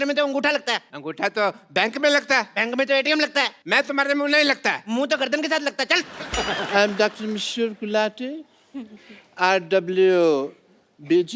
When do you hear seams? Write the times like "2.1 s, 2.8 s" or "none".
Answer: 3.6 s, 6.2 s

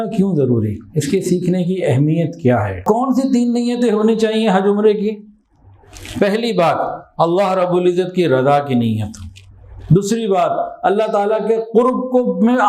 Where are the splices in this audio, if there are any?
2.8 s

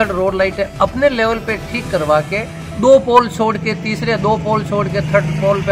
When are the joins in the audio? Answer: none

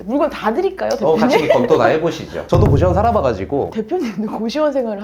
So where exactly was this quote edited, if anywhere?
2.3 s, 3.7 s

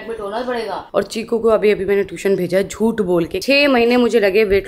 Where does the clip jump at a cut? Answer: 0.8 s, 3.4 s

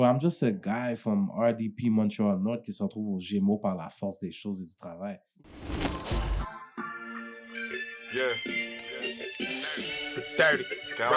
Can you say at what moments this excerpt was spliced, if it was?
5.2 s

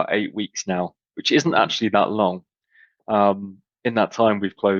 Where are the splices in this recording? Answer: none

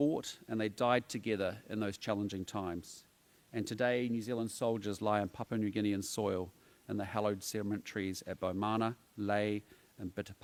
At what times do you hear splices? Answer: none

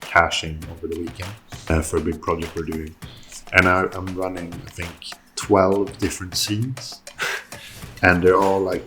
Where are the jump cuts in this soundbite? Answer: 1.7 s

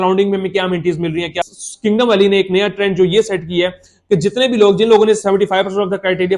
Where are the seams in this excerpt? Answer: 1.4 s

